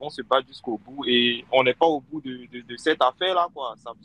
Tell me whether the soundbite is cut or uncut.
uncut